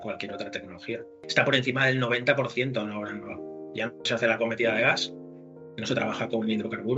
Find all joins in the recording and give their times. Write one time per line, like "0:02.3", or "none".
0:01.2